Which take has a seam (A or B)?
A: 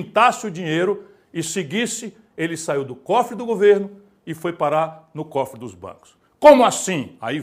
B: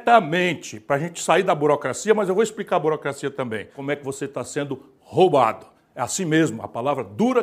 B